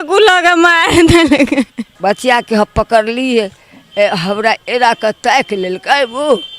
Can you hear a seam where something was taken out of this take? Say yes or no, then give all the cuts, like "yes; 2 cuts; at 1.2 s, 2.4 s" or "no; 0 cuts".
yes; 1 cut; at 1.9 s